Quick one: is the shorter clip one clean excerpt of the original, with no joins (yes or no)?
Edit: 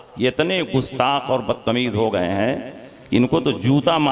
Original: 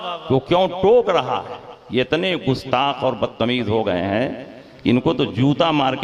yes